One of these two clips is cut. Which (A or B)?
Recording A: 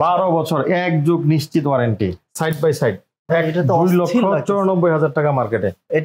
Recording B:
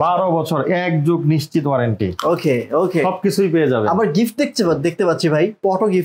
A